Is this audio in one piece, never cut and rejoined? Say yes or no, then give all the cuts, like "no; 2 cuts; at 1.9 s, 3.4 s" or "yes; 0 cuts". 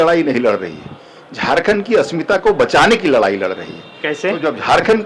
yes; 0 cuts